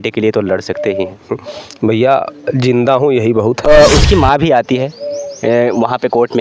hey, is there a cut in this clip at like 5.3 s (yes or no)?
no